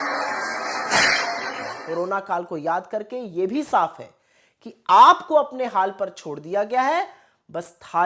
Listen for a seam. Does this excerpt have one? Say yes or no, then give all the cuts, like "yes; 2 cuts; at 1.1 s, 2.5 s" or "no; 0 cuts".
yes; 1 cut; at 1.7 s